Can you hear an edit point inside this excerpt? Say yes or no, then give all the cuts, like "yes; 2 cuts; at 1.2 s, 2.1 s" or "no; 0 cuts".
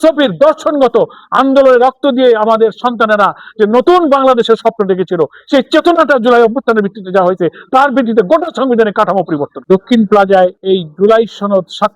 yes; 2 cuts; at 9.5 s, 10.6 s